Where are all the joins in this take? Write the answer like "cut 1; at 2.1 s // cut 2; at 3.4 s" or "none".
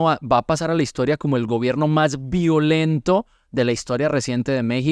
none

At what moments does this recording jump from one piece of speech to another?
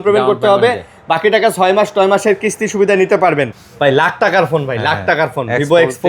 cut 1; at 3.6 s

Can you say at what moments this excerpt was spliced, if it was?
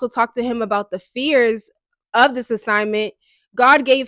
none

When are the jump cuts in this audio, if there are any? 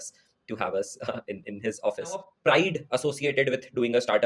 cut 1; at 2.2 s

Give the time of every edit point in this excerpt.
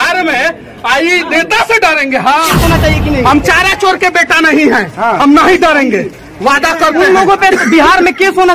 cut 1; at 2.5 s

